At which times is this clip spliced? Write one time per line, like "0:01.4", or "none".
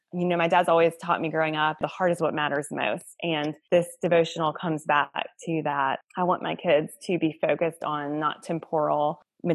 0:01.8
0:03.6